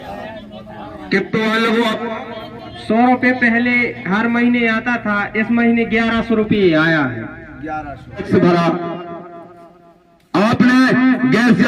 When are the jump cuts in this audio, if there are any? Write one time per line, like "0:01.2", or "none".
0:08.3